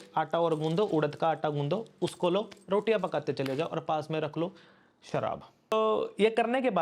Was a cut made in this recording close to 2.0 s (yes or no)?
no